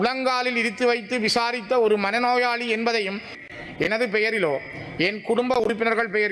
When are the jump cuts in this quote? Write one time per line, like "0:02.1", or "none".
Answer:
0:03.4